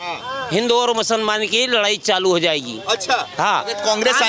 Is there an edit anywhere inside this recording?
no; 0 cuts

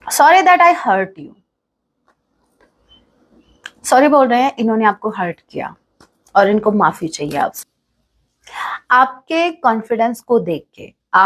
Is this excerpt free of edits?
no; 1 cut; at 7.6 s

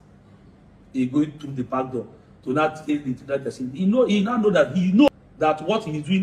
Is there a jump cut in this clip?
yes; 1 cut; at 5.1 s

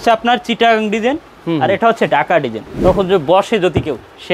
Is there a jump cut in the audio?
yes; 1 cut; at 2.7 s

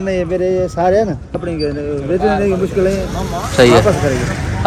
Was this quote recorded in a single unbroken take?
no; 1 cut; at 1.3 s

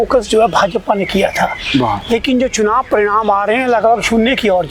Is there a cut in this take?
no; 0 cuts

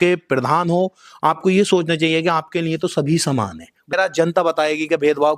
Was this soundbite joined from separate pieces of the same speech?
yes; 1 cut; at 3.9 s

